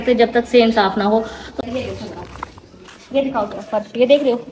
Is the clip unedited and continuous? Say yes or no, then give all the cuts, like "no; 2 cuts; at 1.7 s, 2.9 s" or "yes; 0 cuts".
no; 1 cut; at 1.4 s